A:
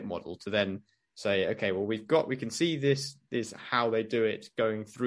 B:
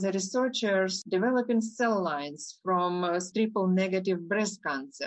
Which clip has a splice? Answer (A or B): B